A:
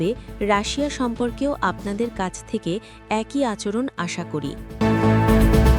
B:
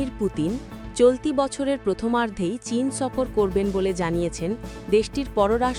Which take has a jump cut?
A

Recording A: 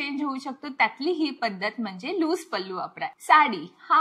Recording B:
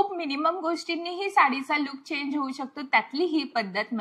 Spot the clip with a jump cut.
A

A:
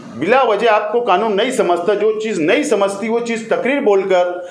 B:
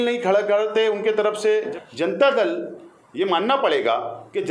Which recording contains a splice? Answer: B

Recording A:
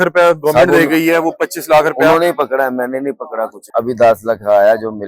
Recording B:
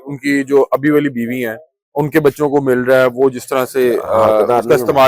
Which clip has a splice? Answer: A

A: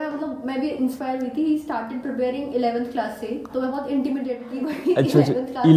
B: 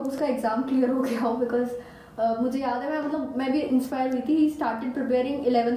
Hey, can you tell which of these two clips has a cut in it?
A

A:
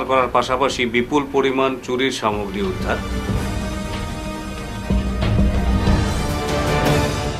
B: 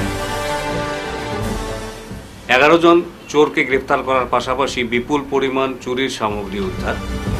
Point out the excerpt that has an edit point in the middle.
B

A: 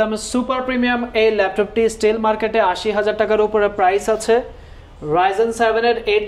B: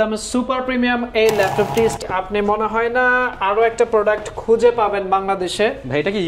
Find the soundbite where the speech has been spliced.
B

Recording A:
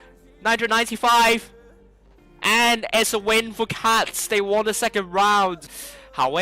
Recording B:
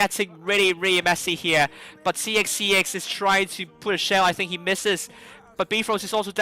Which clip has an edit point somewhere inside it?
A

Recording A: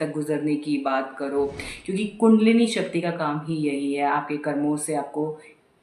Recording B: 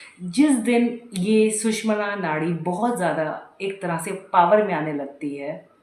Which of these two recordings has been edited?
A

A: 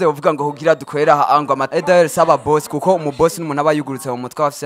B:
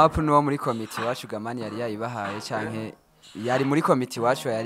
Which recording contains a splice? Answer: A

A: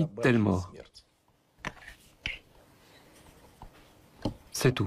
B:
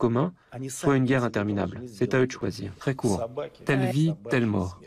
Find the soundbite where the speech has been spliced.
B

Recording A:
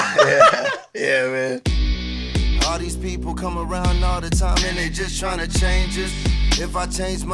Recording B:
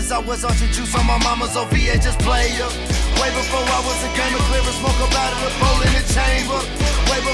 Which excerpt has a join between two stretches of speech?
A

